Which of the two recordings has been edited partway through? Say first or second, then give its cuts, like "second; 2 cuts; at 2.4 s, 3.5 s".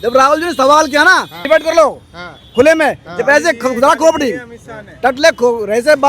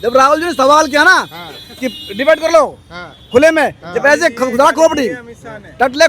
first; 1 cut; at 1.3 s